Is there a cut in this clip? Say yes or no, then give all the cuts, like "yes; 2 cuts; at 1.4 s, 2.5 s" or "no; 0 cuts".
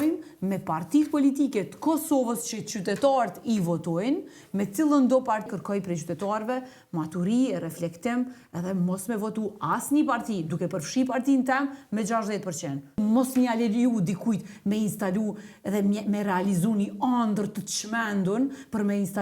yes; 2 cuts; at 5.5 s, 13.0 s